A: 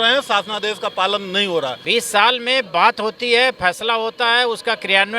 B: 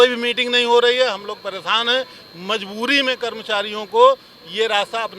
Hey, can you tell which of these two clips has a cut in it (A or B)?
A